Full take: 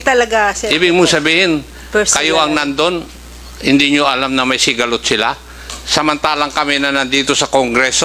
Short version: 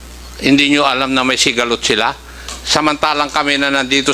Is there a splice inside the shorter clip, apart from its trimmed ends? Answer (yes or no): no